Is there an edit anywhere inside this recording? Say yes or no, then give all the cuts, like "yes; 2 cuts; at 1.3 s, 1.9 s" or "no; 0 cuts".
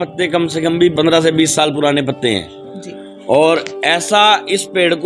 yes; 1 cut; at 0.9 s